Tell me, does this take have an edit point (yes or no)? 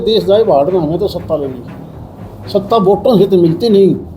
no